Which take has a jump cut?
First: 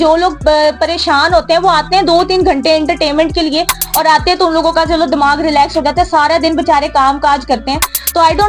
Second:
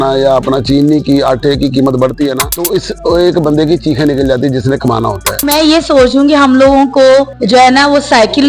second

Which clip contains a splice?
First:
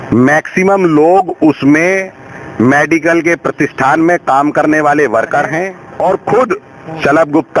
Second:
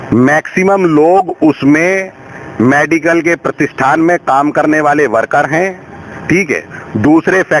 first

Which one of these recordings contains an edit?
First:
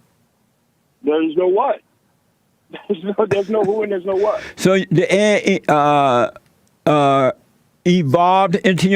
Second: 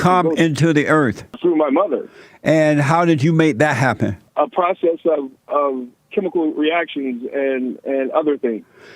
second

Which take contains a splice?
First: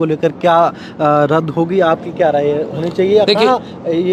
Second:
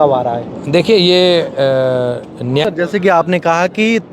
second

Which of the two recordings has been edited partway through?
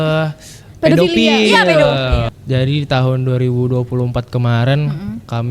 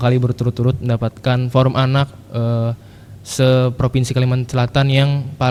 first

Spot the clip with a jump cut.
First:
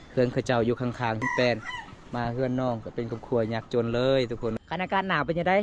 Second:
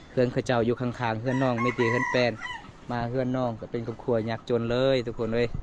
first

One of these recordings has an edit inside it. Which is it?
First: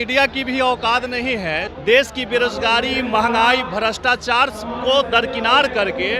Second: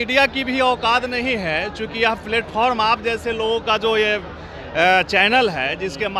first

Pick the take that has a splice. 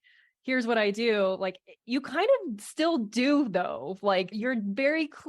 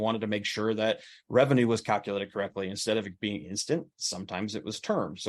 first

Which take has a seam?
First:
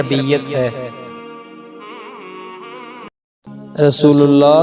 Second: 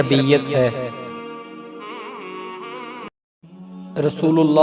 second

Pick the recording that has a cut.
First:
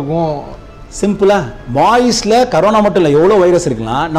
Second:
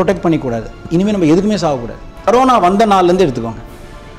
second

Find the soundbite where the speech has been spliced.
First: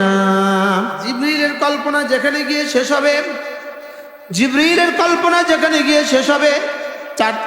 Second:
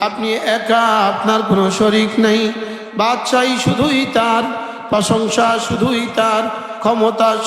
first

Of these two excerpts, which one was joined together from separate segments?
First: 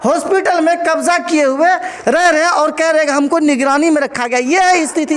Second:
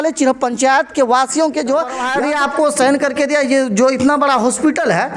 second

